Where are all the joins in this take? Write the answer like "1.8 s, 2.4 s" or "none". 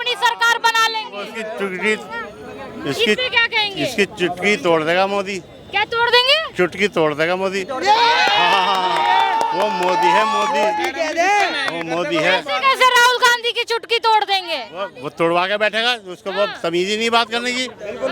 none